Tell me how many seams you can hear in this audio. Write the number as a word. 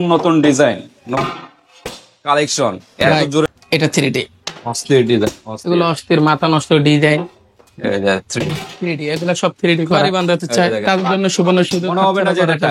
two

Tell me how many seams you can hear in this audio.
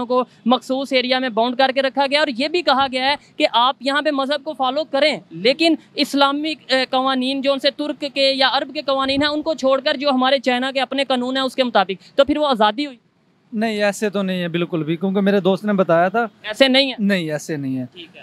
zero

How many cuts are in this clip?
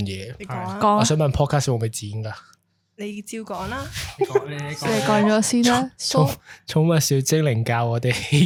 zero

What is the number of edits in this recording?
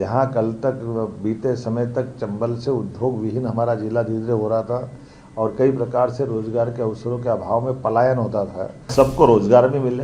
one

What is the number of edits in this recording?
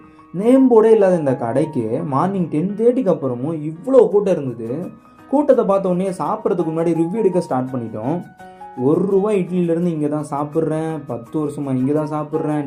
zero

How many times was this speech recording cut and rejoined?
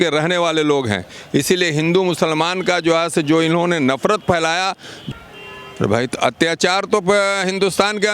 one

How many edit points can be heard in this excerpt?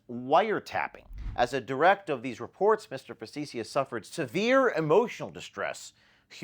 one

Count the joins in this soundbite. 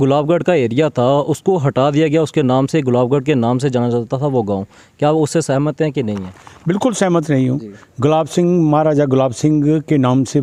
zero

